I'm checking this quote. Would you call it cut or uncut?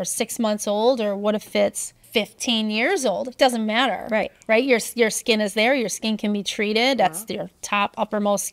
uncut